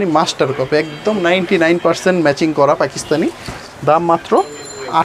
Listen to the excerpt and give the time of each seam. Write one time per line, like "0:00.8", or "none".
none